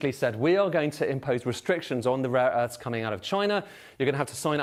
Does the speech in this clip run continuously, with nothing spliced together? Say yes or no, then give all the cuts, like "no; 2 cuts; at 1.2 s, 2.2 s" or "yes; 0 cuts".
yes; 0 cuts